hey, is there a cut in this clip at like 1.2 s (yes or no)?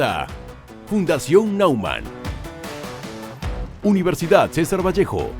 no